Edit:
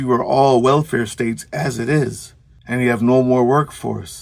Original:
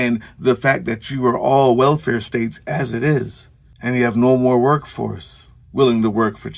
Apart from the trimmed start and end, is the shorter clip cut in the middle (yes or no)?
no